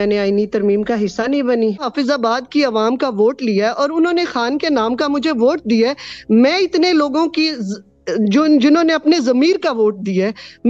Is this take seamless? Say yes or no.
no